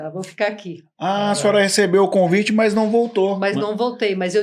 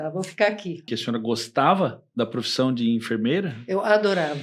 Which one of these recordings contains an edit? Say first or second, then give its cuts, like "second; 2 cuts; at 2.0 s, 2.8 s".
second; 1 cut; at 0.9 s